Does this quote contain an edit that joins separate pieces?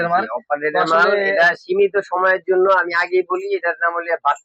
no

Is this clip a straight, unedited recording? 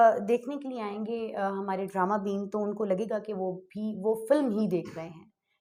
yes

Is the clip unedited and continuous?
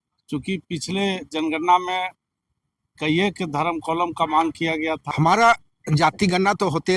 no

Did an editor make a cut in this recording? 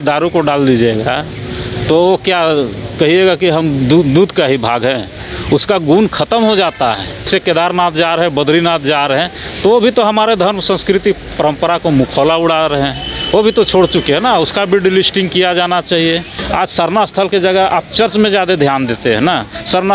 yes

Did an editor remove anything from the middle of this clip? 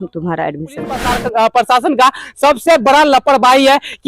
yes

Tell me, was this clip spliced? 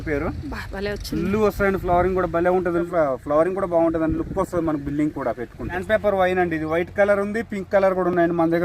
yes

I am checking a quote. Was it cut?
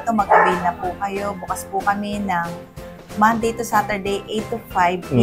no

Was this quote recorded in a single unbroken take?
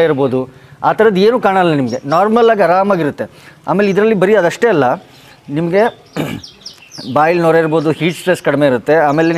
yes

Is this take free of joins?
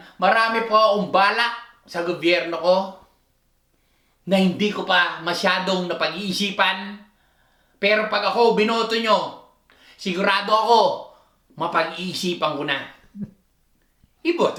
yes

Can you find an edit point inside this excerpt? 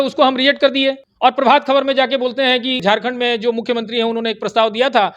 yes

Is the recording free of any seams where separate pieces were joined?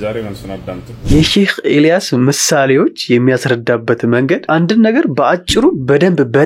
no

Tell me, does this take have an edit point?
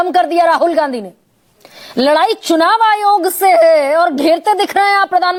no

